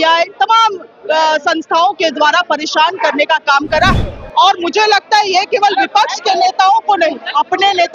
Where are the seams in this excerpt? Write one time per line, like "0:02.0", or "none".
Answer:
0:03.9